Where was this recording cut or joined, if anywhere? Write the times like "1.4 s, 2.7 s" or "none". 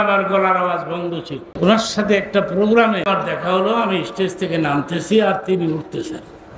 1.4 s, 3.0 s